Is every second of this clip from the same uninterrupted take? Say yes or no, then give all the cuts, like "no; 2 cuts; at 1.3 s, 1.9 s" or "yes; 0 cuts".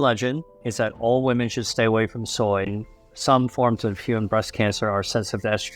no; 1 cut; at 2.8 s